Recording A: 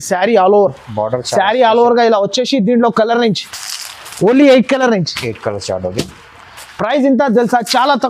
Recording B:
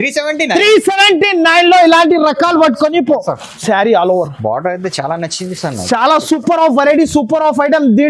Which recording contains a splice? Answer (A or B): B